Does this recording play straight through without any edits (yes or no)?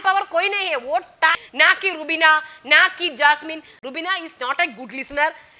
no